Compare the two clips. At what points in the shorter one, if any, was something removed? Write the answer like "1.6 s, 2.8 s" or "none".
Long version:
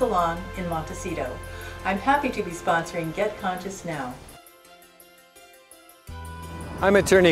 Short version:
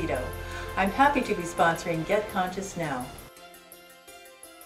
3.2 s